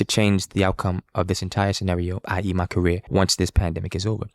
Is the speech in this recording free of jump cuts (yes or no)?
no